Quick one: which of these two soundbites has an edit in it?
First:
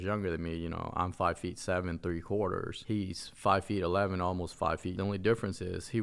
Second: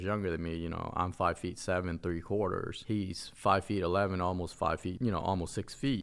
first; 1 cut; at 4.9 s

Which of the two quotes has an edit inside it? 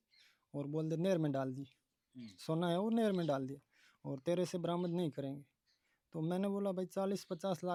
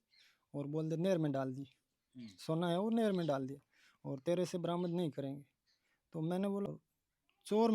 second; 1 cut; at 6.7 s

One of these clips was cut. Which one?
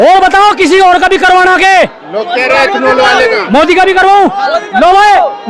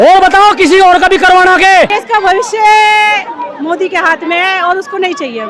second; 1 cut; at 2.0 s

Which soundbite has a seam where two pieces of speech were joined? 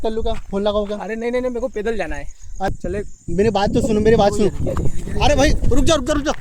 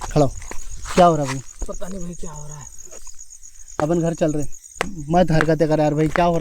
first; 1 cut; at 2.7 s

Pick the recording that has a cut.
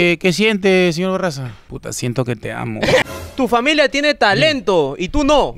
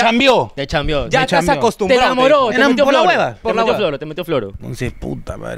first; 1 cut; at 3.0 s

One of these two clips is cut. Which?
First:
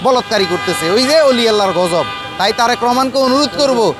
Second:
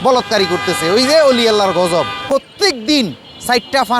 second; 1 cut; at 2.2 s

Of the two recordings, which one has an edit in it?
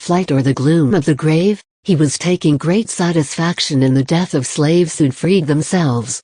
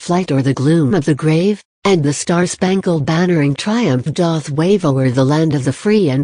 second; 2 cuts; at 1.7 s, 4.5 s

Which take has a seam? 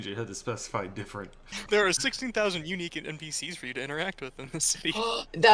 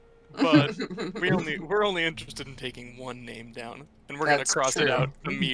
first; 1 cut; at 1.5 s

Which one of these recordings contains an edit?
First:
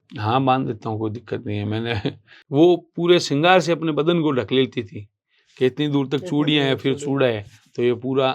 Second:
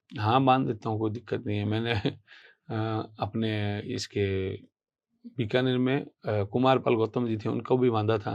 first; 1 cut; at 2.4 s

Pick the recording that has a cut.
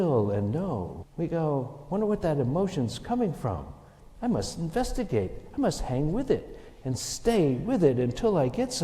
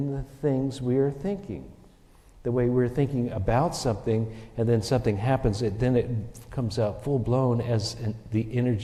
first; 1 cut; at 1.0 s

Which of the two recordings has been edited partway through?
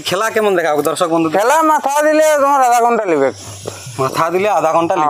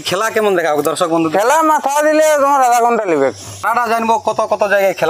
second; 1 cut; at 3.5 s

